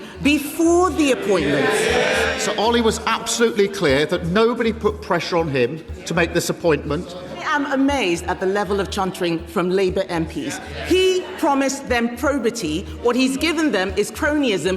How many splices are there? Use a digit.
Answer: 2